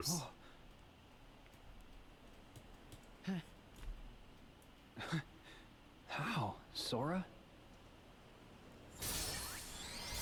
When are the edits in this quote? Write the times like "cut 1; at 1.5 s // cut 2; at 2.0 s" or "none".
none